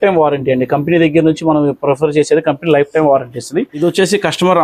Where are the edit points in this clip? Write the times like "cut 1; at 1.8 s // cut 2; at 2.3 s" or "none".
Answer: cut 1; at 3.7 s